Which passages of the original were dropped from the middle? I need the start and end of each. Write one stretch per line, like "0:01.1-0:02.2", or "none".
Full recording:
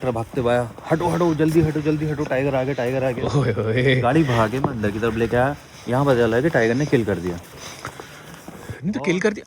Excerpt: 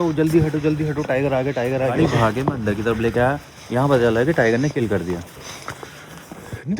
0:03.2-0:04.1